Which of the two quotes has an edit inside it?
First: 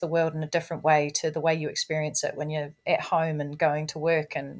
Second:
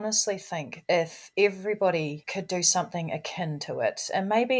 second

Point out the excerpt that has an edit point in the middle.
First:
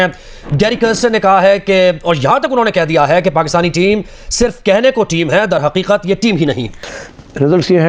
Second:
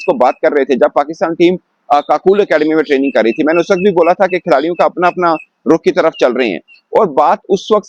first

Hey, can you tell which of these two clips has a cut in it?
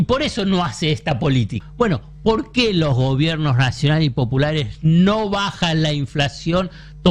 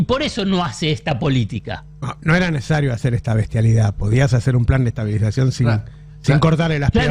first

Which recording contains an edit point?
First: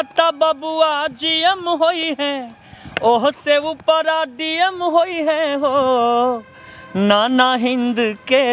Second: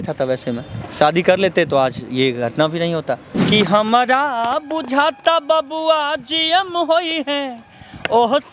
second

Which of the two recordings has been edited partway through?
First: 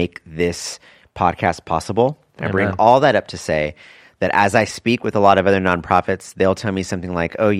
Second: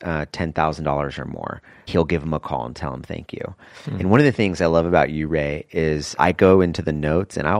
second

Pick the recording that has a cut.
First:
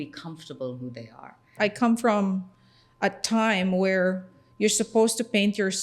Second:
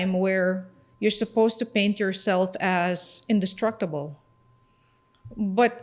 first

